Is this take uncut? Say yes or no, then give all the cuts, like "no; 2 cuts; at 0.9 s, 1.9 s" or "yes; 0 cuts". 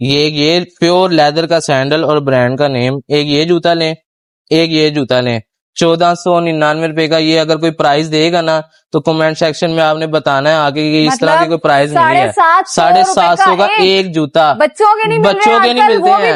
yes; 0 cuts